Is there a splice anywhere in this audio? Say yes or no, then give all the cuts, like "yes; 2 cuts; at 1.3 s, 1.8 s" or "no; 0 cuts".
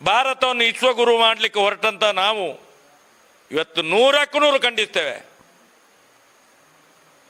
no; 0 cuts